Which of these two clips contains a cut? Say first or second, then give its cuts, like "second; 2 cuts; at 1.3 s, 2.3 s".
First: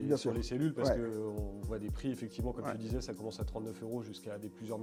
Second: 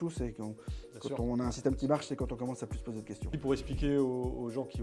second; 1 cut; at 3.3 s